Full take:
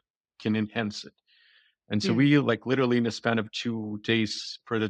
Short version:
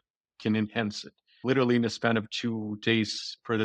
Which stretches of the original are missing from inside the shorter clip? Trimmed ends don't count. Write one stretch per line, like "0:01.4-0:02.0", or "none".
0:01.4-0:02.6

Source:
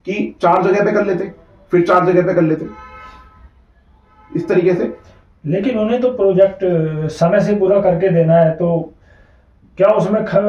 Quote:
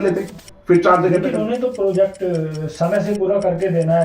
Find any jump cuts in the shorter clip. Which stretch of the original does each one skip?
0:02.3-0:05.7

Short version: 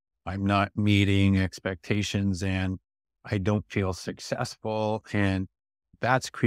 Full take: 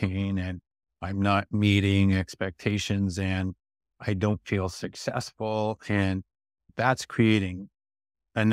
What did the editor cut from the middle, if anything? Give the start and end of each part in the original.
none

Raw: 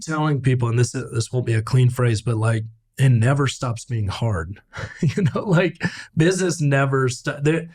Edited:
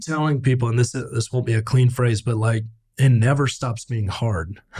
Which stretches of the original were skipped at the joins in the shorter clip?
none

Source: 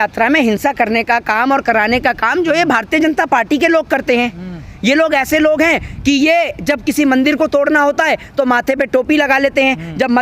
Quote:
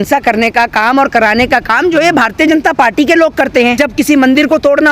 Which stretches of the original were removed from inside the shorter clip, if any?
0:04.3-0:06.6

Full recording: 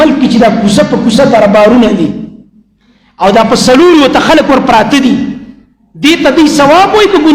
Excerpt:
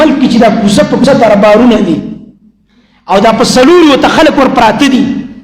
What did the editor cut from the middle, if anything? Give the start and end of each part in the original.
0:01.0-0:01.1

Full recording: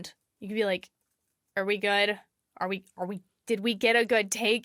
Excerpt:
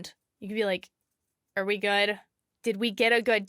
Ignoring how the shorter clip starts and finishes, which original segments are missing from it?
0:02.4-0:03.3

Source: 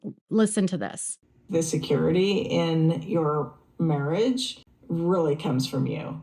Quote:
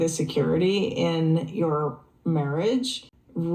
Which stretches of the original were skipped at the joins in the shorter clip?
none

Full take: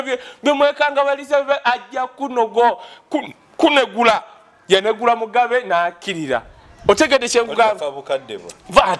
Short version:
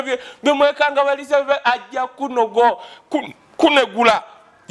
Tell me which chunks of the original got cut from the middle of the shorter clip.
none

